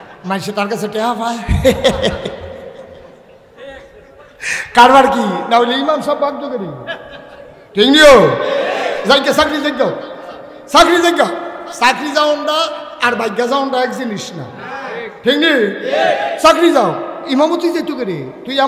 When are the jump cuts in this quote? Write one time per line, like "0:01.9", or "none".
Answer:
none